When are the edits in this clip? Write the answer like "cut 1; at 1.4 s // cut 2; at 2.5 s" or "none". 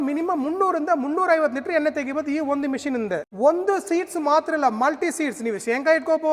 cut 1; at 3.3 s

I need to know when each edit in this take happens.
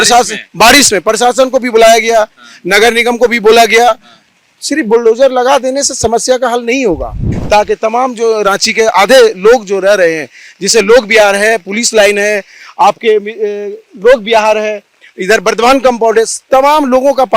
cut 1; at 7.3 s

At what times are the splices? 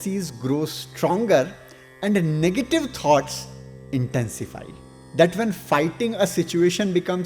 cut 1; at 4.9 s

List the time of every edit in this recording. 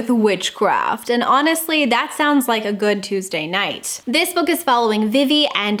none

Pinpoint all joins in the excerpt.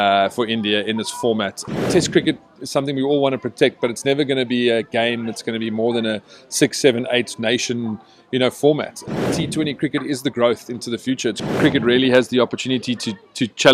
cut 1; at 1.7 s // cut 2; at 9.2 s // cut 3; at 11.5 s

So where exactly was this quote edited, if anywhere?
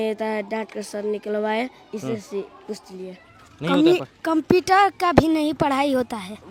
none

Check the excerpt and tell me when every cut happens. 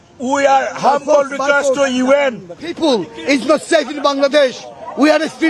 cut 1; at 2.8 s

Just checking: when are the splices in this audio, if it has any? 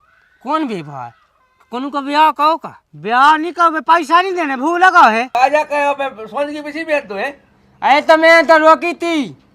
cut 1; at 5.3 s

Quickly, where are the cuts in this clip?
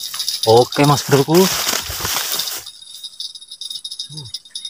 none

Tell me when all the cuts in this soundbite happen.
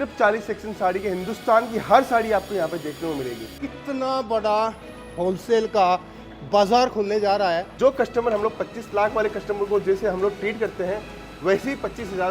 cut 1; at 3.5 s // cut 2; at 7.7 s

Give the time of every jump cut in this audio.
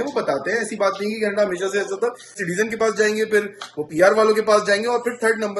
cut 1; at 2.4 s

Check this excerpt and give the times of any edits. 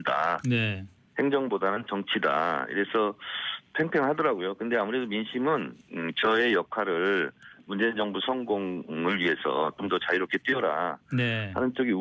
none

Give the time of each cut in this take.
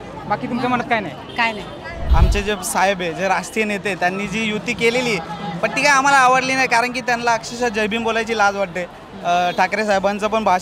cut 1; at 1.9 s

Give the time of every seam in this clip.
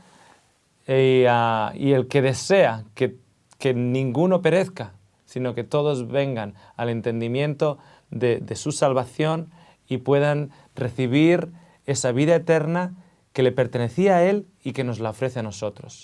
none

